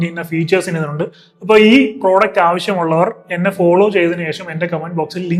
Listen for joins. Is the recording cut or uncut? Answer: uncut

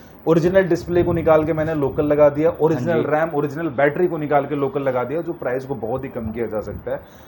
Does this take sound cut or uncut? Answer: uncut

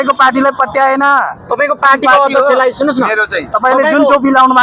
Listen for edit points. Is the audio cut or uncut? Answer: uncut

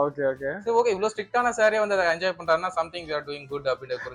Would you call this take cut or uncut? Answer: uncut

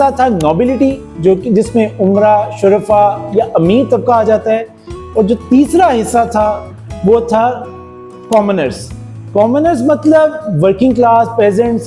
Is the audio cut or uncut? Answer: uncut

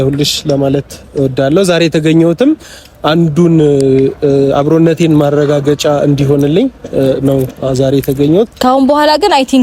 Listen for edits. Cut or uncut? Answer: cut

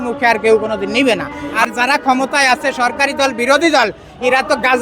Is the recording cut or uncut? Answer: cut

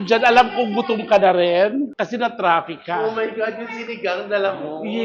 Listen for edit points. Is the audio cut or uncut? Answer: uncut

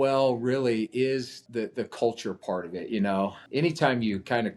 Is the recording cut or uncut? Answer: cut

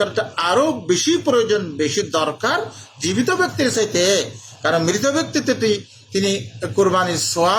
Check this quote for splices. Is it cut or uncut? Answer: uncut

